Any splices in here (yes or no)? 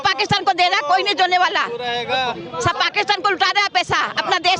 no